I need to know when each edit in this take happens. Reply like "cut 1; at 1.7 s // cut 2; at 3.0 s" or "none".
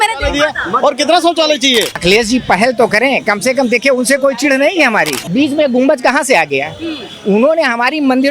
cut 1; at 1.9 s // cut 2; at 5.2 s